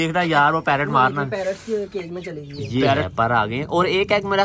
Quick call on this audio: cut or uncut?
cut